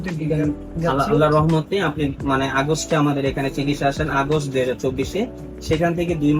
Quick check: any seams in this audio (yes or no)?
no